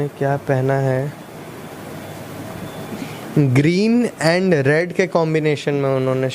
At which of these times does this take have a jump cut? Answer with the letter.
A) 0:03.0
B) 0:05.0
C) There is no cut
A